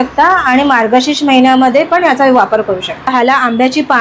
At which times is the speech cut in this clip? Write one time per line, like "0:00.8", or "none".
0:03.1